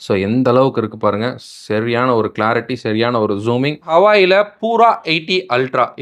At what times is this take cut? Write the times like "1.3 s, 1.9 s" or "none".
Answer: 3.9 s